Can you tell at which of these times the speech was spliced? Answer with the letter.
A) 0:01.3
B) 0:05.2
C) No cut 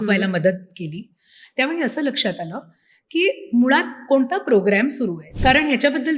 B